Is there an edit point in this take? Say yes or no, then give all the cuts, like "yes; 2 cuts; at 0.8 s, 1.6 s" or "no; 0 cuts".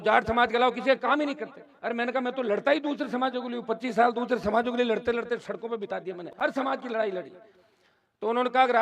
no; 0 cuts